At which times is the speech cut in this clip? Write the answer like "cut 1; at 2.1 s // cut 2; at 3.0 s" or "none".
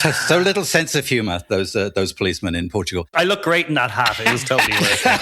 cut 1; at 3.1 s